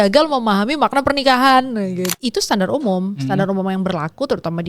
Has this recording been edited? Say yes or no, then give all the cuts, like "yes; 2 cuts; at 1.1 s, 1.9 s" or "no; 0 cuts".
yes; 1 cut; at 2.0 s